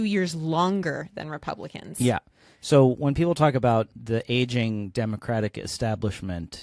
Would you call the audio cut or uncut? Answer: uncut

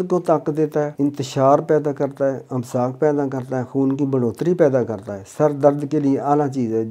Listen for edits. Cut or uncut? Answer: cut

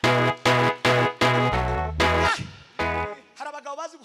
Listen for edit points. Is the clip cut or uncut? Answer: cut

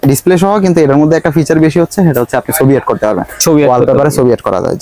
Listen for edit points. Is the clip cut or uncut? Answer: uncut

